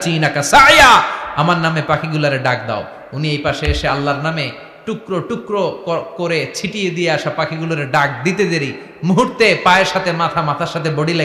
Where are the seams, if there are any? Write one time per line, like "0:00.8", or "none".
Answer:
none